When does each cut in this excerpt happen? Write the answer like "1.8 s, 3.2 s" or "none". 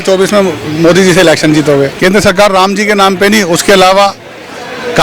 1.9 s

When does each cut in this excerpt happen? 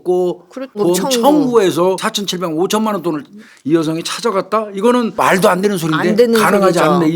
0.8 s, 2.1 s, 5.1 s

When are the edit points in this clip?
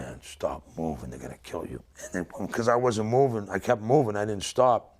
1.9 s

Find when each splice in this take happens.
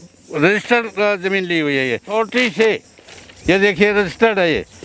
2.2 s

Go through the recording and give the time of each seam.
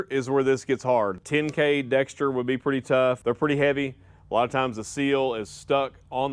1.2 s, 3.2 s

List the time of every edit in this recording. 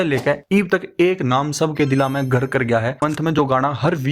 3.0 s

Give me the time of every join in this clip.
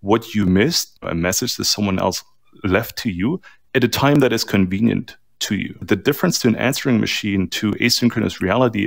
5.8 s

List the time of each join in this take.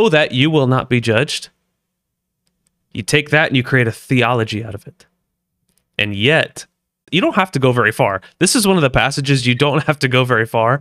7.0 s

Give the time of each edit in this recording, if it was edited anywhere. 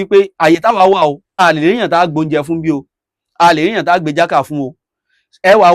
none

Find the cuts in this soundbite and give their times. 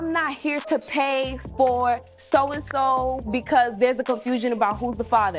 none

